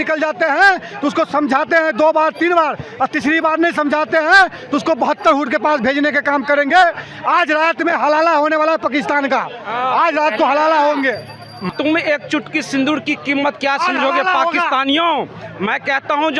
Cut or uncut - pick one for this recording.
uncut